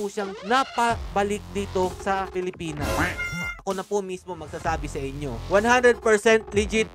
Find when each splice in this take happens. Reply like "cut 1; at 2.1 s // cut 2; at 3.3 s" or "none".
cut 1; at 3.5 s